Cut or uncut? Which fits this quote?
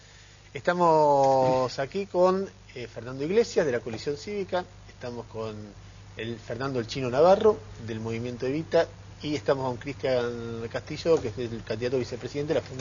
uncut